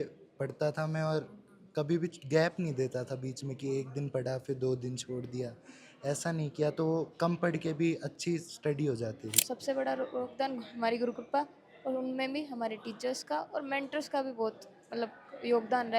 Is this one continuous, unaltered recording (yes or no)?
no